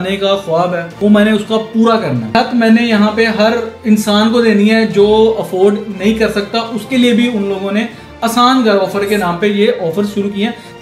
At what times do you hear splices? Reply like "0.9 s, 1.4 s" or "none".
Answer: 0.9 s, 2.2 s, 3.7 s